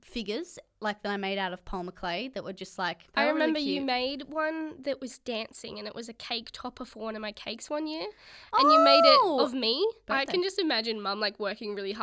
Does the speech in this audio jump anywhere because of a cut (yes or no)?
yes